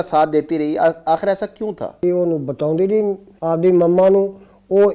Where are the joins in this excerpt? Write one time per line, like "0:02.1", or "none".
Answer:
0:02.0
0:03.3